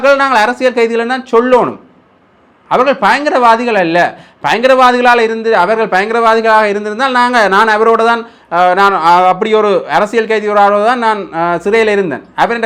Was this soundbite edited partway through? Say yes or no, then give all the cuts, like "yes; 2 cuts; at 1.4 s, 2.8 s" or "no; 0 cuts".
no; 0 cuts